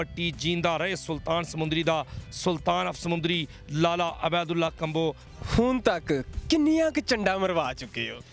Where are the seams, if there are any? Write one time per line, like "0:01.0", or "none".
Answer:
0:05.2

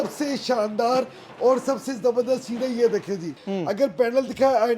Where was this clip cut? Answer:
0:03.4

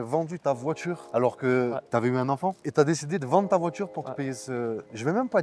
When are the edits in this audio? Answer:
0:02.6

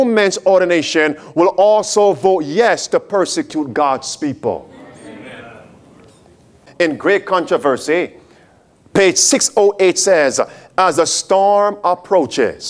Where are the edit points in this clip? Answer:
0:06.7

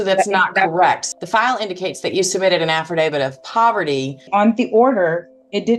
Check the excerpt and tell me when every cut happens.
0:01.0
0:04.3

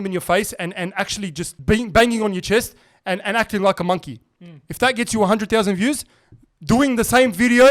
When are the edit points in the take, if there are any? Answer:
0:01.5

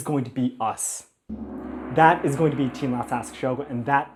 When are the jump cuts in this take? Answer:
none

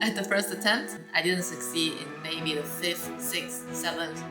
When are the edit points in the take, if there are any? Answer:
0:01.0

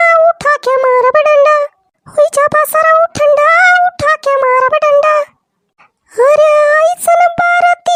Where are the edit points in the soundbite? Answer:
none

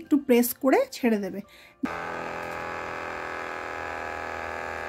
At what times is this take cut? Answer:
0:01.9

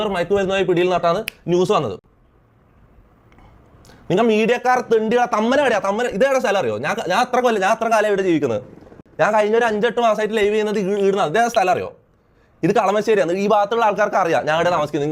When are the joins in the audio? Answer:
none

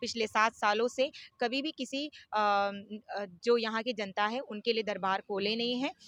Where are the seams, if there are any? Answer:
none

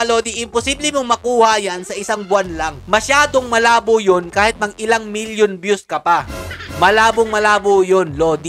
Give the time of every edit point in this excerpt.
none

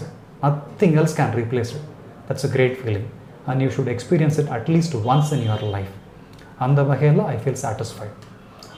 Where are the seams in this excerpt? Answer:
none

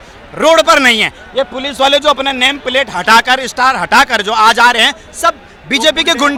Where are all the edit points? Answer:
none

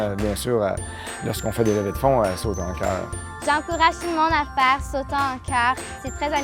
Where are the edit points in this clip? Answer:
0:01.2

